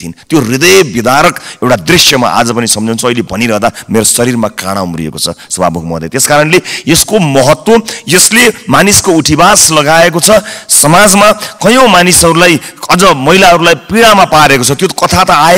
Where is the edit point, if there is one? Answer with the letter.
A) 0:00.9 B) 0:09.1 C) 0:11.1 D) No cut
D